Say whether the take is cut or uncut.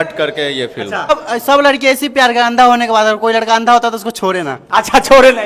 cut